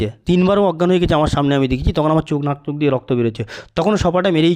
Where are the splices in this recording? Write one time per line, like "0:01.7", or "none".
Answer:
none